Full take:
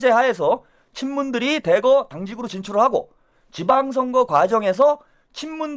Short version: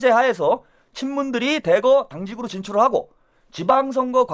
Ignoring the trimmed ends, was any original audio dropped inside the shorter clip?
no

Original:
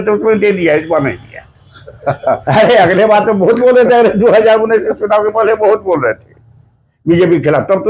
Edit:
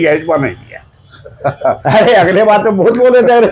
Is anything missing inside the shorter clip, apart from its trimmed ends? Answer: no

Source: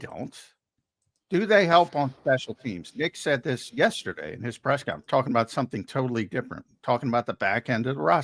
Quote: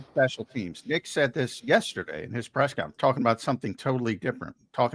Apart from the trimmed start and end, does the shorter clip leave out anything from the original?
no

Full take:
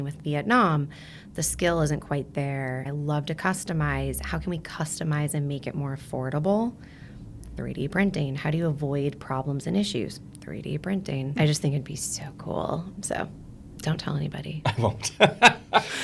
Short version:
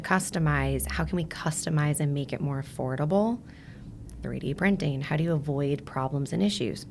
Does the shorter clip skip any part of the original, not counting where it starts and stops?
no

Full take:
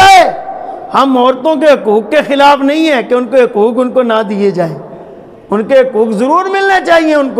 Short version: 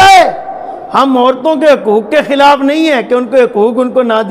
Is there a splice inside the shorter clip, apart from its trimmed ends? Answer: no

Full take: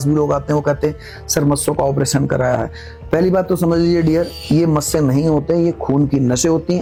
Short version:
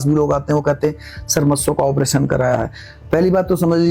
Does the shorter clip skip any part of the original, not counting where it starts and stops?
no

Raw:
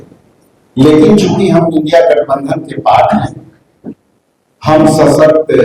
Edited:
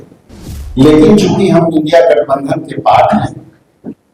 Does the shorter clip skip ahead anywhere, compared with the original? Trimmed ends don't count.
no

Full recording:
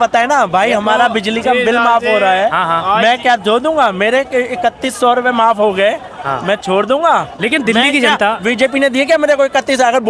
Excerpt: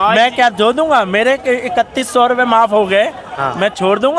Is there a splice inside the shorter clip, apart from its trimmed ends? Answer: no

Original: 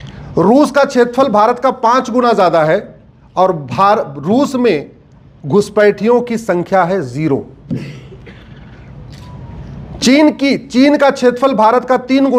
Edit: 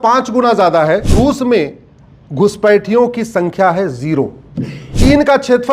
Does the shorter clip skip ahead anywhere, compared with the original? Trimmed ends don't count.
yes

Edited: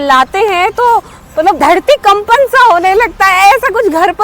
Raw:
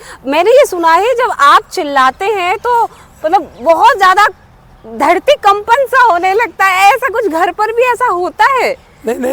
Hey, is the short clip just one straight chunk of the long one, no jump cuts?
no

